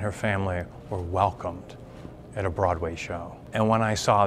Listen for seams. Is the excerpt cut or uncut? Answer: uncut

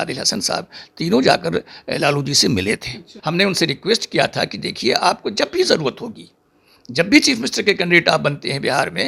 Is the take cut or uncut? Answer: cut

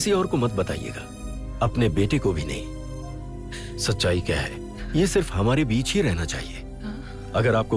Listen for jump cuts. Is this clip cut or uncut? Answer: uncut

